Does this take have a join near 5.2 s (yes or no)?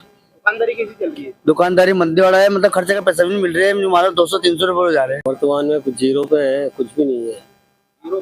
yes